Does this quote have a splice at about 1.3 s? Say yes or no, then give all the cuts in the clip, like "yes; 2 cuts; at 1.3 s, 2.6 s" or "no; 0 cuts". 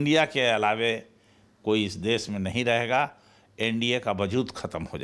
no; 0 cuts